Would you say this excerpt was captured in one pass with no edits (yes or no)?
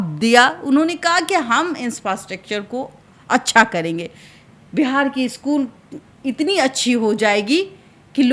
yes